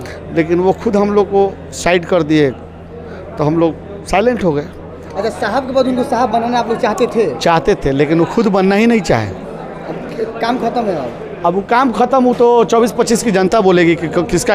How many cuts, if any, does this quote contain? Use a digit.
0